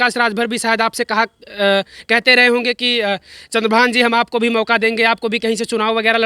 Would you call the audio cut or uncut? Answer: uncut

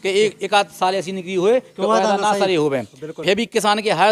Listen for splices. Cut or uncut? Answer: uncut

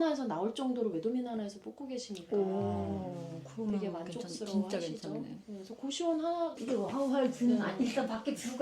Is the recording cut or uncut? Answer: cut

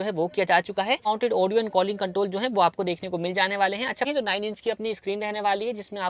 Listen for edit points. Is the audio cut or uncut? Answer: cut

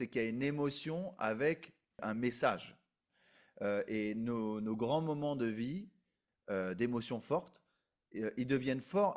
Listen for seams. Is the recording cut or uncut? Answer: cut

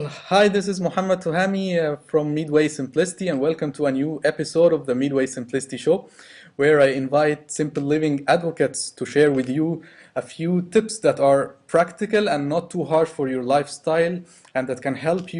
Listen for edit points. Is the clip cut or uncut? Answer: cut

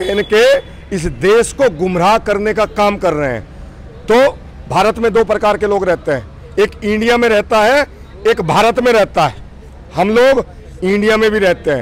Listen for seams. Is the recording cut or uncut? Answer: uncut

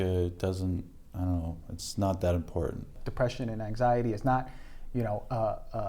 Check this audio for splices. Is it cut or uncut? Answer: cut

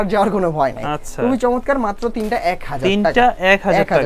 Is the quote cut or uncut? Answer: uncut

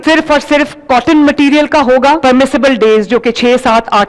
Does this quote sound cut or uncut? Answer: cut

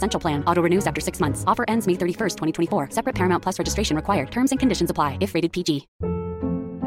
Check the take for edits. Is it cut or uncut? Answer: cut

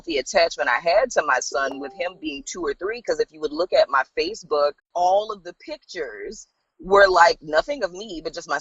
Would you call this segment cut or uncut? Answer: cut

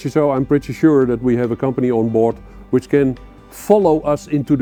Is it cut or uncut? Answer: uncut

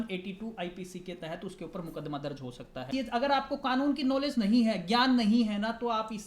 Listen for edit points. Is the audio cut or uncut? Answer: cut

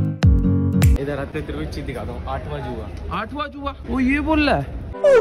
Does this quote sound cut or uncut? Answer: cut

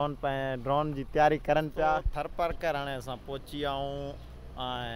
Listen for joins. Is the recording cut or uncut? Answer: cut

